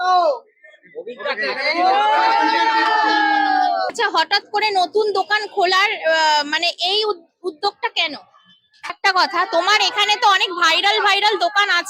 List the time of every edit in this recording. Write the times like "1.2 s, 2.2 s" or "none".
3.9 s, 8.9 s